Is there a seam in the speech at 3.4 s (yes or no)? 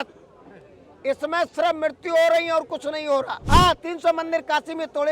yes